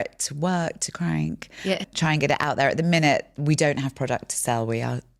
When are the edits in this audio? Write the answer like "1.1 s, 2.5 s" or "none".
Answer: none